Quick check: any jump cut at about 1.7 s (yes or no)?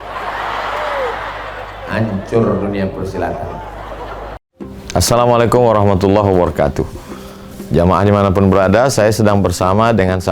no